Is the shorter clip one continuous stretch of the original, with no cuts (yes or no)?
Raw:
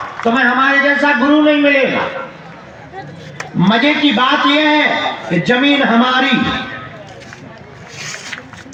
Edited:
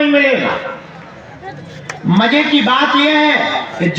yes